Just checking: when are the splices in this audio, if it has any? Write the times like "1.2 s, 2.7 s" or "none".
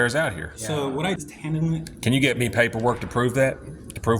1.2 s